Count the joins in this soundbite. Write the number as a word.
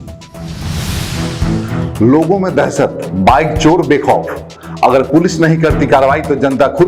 one